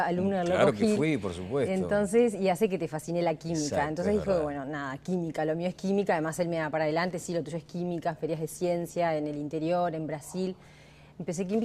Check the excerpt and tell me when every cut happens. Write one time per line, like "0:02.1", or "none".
0:06.1